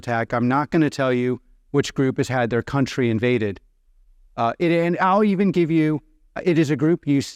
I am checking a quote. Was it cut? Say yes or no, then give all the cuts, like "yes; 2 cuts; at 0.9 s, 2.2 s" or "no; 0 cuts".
no; 0 cuts